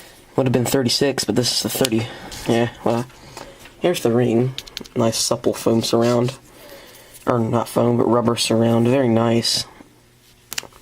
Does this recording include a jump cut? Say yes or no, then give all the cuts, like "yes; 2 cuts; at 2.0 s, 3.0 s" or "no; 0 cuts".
no; 0 cuts